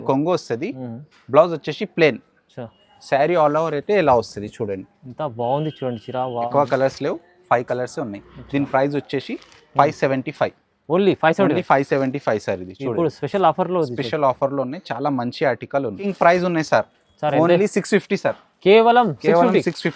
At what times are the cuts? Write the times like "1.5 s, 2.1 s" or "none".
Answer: 6.5 s, 16.0 s